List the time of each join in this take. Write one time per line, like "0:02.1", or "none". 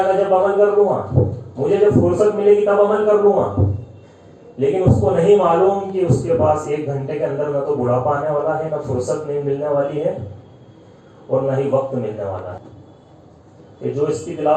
0:12.6